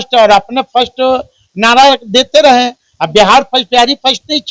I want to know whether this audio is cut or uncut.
uncut